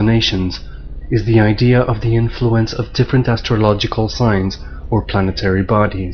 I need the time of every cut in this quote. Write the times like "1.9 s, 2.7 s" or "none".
none